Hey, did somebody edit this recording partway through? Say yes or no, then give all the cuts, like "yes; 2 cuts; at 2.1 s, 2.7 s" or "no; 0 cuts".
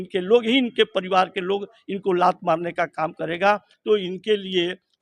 yes; 1 cut; at 3.7 s